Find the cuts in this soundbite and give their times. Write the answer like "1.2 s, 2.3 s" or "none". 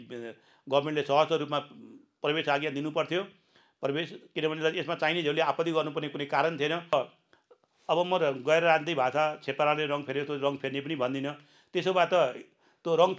6.9 s